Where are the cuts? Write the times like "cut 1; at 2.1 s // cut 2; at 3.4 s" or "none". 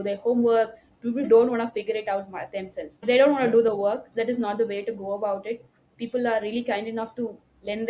cut 1; at 1.3 s // cut 2; at 3.0 s // cut 3; at 4.1 s